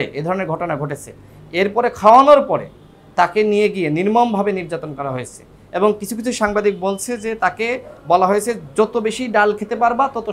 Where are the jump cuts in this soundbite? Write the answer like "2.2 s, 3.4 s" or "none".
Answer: none